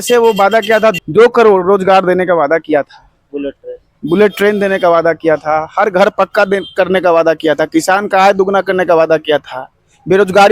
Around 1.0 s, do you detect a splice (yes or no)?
yes